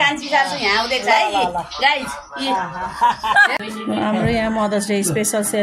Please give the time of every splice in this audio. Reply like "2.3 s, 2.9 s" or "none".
3.5 s